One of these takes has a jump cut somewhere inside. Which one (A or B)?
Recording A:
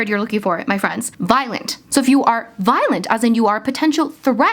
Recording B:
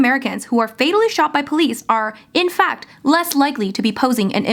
A